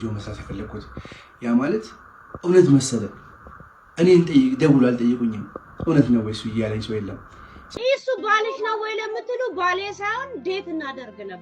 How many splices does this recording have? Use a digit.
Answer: 1